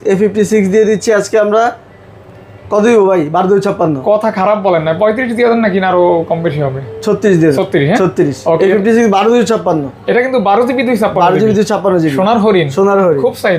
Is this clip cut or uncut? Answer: uncut